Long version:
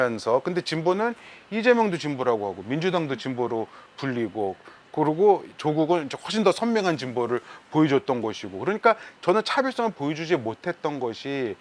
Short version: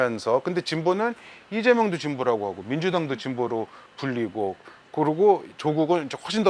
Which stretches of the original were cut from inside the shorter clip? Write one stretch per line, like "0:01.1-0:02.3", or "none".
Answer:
none